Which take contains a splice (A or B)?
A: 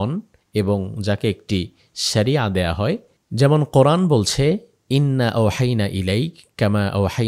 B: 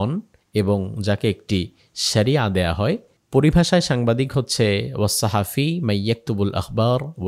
B